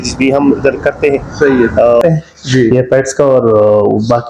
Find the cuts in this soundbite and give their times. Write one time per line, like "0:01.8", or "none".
0:02.0